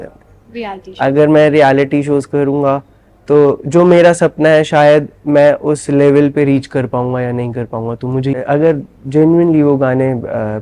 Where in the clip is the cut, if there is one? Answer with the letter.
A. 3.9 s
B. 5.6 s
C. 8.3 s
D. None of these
C